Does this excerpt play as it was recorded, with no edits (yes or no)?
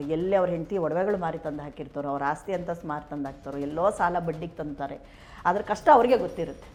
yes